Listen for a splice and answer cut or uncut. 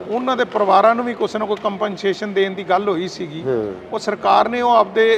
uncut